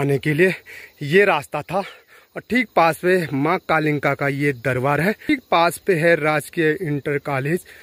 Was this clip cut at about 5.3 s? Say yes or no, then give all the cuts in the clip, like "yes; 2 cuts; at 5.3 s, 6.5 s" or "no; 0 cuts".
yes; 1 cut; at 5.3 s